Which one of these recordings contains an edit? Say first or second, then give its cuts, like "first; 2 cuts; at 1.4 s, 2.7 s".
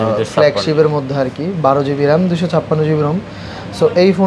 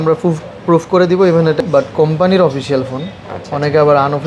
second; 1 cut; at 1.6 s